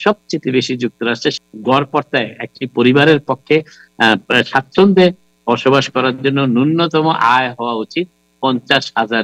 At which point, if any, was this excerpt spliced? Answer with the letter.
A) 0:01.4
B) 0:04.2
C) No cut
A